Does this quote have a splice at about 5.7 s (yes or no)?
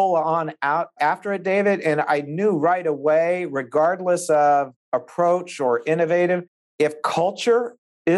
no